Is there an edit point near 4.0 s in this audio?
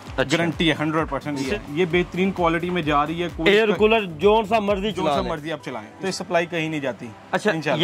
no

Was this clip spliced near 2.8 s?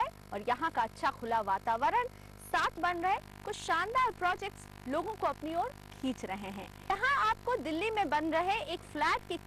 yes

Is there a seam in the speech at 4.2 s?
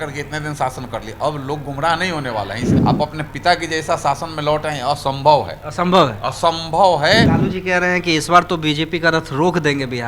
no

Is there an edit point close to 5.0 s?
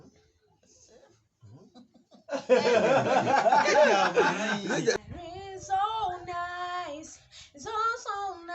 yes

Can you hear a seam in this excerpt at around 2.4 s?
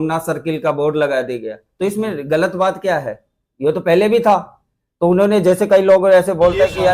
no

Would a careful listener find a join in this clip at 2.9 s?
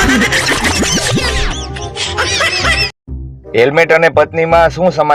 yes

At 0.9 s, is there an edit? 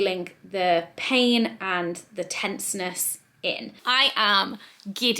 no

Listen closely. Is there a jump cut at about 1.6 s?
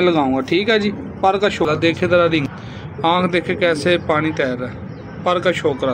yes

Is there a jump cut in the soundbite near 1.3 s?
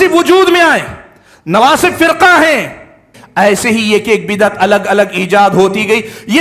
no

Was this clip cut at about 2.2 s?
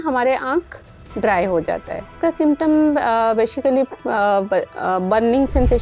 yes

